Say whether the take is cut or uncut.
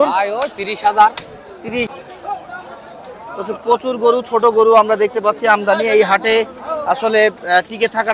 cut